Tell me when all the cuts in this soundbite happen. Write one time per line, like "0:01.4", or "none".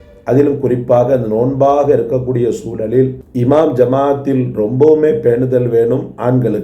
0:03.4